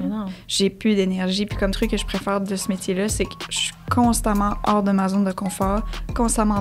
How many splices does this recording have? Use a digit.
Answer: 1